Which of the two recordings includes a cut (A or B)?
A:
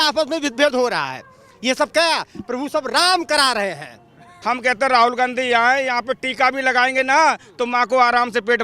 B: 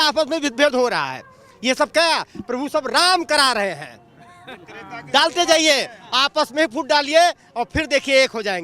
A